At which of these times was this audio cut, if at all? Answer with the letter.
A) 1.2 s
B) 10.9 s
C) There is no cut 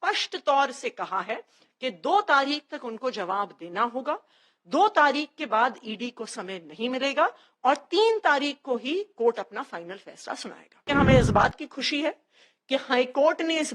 B